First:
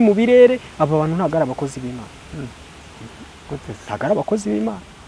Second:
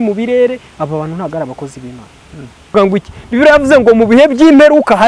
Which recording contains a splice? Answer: second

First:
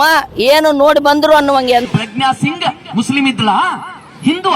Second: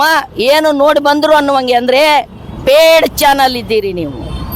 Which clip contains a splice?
first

